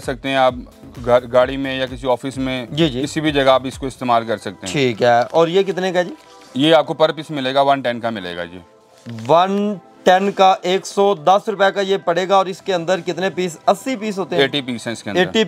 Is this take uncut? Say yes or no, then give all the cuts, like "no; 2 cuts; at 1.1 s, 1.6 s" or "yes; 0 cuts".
yes; 0 cuts